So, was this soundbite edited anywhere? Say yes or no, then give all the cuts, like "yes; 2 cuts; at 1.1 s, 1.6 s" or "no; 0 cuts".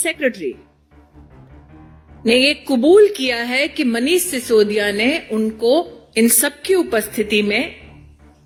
no; 0 cuts